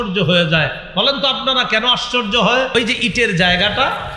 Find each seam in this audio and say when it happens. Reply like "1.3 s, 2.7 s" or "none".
2.7 s